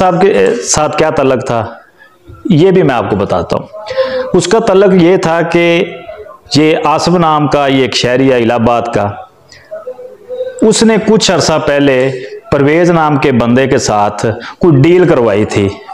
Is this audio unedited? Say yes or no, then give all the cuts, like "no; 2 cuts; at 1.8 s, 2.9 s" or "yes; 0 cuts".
yes; 0 cuts